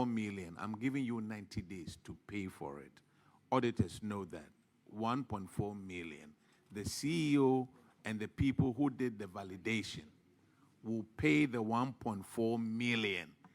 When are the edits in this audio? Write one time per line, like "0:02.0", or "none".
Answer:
none